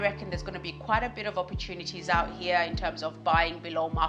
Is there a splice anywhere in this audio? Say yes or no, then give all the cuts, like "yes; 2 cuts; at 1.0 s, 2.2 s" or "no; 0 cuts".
no; 0 cuts